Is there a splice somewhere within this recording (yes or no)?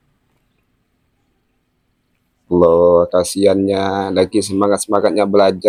no